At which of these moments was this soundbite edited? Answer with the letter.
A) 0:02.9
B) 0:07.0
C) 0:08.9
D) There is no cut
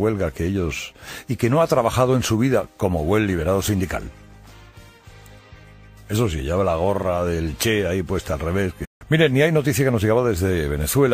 D